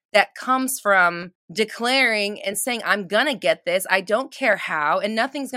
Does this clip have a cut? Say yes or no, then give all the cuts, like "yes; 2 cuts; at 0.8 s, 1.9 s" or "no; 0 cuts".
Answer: yes; 1 cut; at 1.3 s